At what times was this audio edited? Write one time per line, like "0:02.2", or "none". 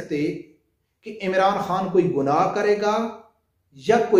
none